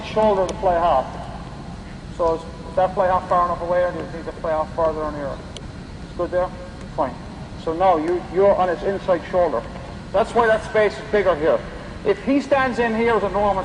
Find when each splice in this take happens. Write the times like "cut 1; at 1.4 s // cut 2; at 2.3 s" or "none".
cut 1; at 9.2 s

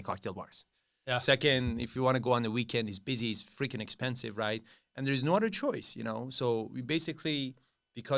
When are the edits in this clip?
none

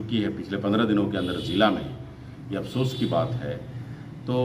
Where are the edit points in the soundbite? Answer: none

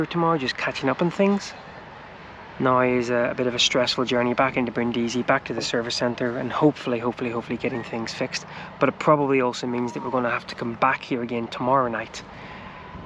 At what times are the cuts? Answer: none

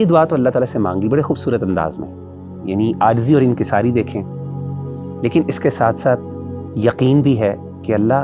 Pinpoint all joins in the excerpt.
none

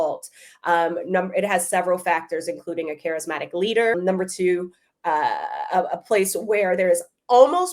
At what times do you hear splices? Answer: cut 1; at 3.9 s

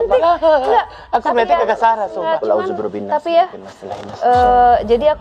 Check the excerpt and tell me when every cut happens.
none

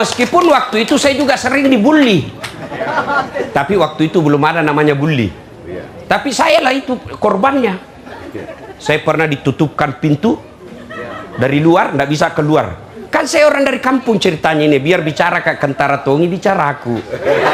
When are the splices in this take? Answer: none

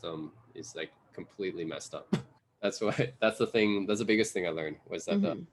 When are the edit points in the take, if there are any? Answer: cut 1; at 2.3 s

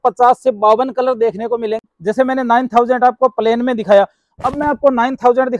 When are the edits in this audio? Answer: cut 1; at 1.8 s

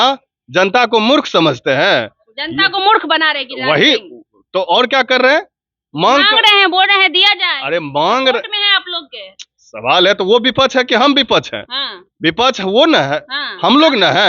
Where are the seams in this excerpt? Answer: none

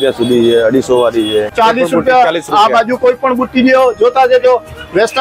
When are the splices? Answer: cut 1; at 1.5 s

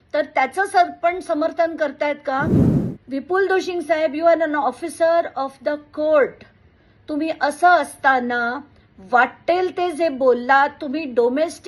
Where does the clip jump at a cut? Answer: cut 1; at 2.6 s

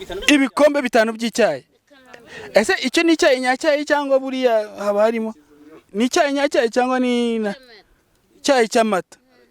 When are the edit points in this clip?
cut 1; at 5.9 s

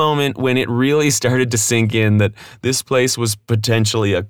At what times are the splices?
none

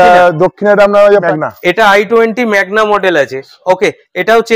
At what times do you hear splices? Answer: cut 1; at 1.3 s

